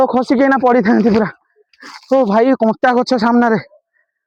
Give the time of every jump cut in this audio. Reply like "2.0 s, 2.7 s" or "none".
none

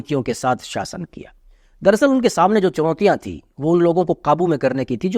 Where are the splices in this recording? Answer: none

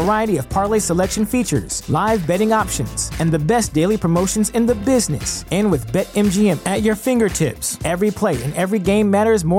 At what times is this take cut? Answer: none

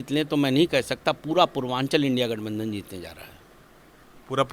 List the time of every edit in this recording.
none

